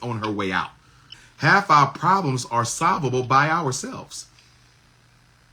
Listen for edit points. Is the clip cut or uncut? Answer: cut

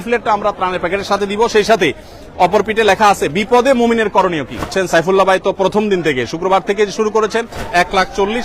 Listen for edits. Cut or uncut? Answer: cut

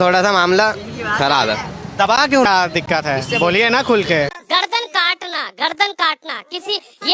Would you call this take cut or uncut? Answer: cut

